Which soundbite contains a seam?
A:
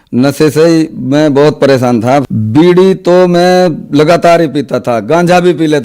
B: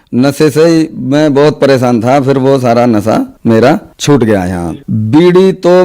A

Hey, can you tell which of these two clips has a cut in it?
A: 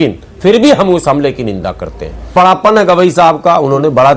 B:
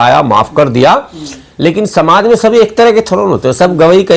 A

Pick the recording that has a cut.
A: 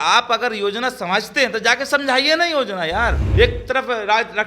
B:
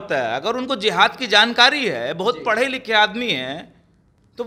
A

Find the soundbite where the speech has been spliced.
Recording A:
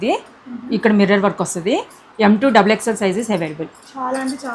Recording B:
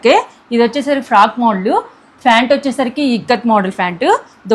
A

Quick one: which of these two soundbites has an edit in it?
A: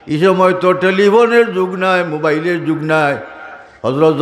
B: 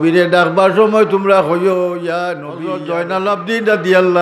B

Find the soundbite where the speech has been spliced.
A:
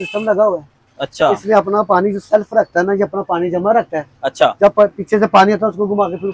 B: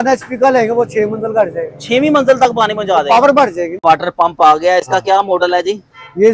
B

